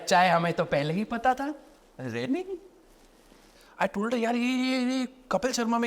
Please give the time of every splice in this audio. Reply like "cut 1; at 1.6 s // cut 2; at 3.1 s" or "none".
cut 1; at 3.4 s